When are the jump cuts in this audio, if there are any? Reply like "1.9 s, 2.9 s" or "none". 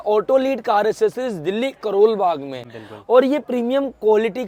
none